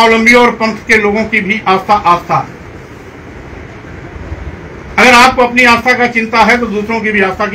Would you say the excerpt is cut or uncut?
uncut